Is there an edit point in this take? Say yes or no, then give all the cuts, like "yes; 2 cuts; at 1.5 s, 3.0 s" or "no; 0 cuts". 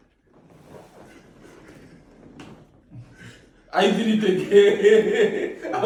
no; 0 cuts